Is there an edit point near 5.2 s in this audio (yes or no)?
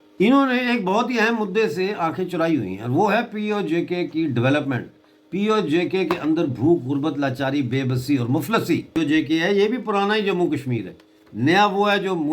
no